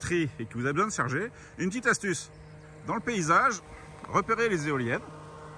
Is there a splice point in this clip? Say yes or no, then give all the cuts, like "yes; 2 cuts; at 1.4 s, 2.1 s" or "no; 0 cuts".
no; 0 cuts